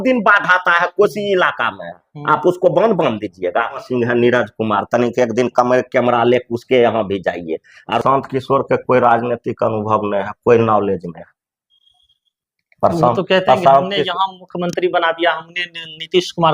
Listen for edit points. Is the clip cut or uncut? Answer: cut